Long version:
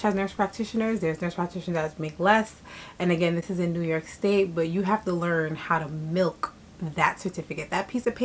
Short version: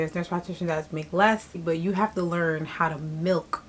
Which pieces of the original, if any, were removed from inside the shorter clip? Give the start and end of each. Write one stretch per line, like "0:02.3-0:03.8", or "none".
0:02.7-0:04.5